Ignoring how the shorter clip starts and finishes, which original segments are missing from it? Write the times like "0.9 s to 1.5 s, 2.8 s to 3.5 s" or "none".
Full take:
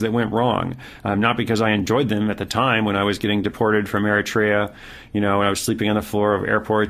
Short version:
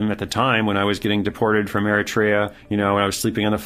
4.8 s to 5.0 s